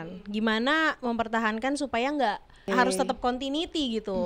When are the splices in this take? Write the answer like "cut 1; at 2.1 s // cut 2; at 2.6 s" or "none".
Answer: cut 1; at 2.6 s